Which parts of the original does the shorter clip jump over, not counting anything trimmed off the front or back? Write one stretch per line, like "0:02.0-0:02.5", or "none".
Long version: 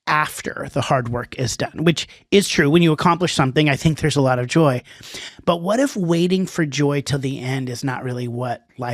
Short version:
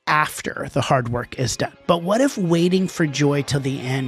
0:01.6-0:05.2